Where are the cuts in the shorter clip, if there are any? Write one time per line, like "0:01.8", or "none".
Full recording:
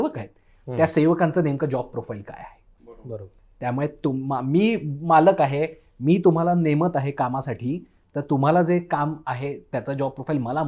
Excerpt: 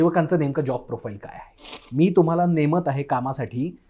0:01.8